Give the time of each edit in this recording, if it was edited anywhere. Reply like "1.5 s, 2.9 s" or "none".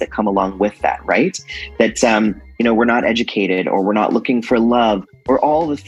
none